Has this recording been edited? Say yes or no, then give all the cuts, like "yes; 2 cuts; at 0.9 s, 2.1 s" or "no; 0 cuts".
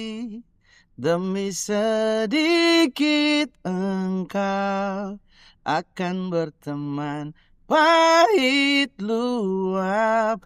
no; 0 cuts